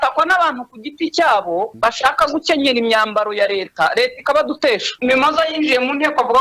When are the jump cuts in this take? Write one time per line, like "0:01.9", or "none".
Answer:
0:01.7
0:04.9